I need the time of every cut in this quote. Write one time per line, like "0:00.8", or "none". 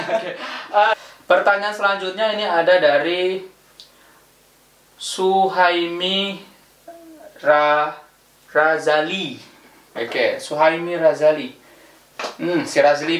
0:00.9